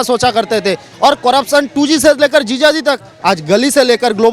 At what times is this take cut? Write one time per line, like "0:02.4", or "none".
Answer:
0:03.1